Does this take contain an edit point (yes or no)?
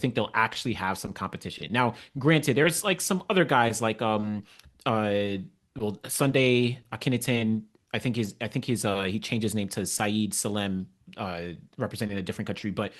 no